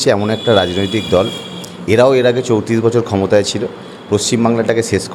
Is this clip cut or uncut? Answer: uncut